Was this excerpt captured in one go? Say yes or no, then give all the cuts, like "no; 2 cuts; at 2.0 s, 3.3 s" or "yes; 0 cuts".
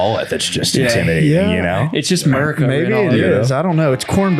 yes; 0 cuts